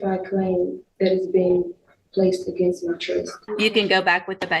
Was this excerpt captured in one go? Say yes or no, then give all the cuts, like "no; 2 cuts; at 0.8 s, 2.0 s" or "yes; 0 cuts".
no; 1 cut; at 3.4 s